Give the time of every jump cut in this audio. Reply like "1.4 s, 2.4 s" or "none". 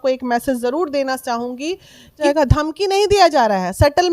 2.2 s

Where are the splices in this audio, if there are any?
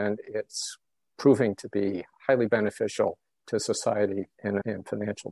2.1 s

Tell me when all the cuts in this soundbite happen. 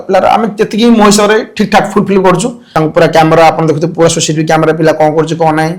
2.8 s

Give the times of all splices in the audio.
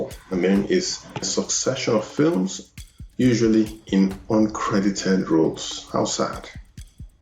1.3 s

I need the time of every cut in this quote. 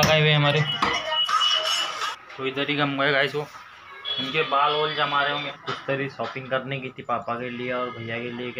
2.1 s, 5.5 s

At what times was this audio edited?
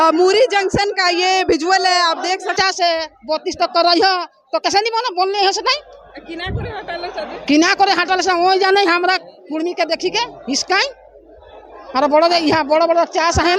2.6 s

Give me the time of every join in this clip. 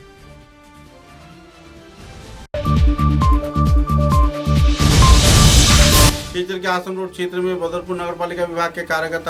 none

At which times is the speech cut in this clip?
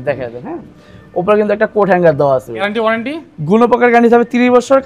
2.6 s

